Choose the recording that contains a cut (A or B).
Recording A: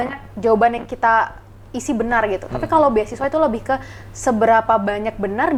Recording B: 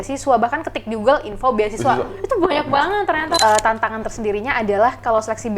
B